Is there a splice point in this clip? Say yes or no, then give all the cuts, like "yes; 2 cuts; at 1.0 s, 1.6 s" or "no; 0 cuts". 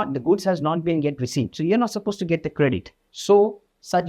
yes; 1 cut; at 3.1 s